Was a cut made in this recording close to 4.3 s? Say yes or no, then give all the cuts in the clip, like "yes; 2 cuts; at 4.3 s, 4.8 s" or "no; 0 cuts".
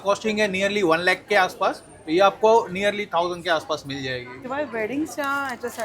yes; 1 cut; at 4.3 s